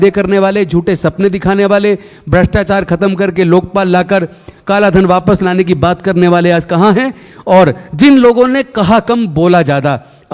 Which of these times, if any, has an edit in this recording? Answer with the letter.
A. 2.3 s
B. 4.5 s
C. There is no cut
C